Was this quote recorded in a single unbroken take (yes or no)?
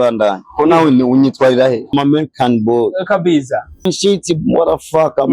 no